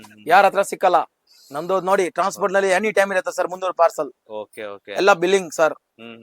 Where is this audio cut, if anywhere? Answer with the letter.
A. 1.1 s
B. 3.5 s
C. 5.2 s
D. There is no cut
D